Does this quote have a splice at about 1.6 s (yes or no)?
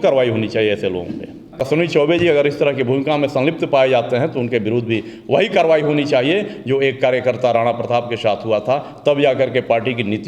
yes